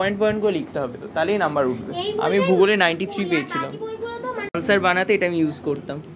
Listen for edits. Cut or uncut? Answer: cut